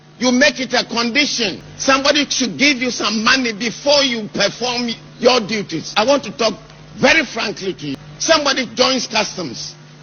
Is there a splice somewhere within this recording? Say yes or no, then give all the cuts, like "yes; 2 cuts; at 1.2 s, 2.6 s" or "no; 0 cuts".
yes; 3 cuts; at 1.7 s, 5.9 s, 8.0 s